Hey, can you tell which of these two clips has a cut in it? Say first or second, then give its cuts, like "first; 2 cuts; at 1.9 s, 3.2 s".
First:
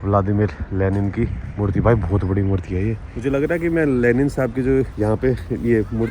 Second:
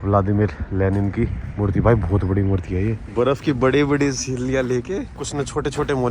second; 2 cuts; at 3.0 s, 5.2 s